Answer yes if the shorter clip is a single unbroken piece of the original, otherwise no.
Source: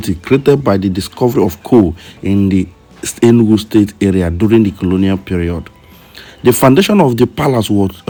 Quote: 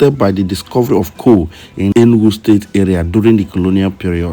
no